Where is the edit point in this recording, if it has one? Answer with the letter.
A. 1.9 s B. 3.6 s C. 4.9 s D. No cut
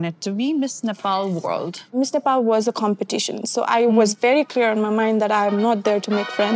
A